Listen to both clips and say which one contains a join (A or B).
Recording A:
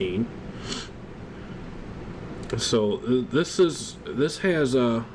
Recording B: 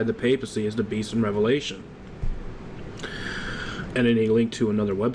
B